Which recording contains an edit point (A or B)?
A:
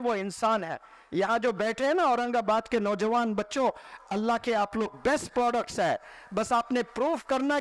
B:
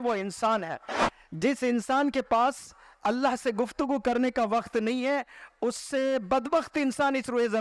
B